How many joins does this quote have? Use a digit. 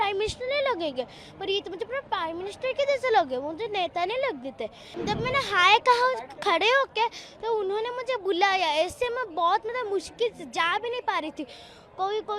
1